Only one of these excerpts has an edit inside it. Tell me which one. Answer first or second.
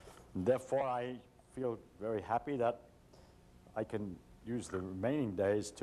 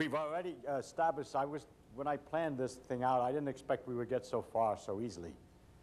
first